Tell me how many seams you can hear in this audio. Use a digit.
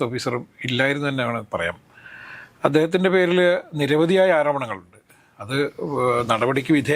0